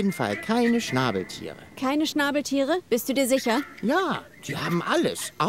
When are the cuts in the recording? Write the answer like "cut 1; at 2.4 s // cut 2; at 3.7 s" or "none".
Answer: none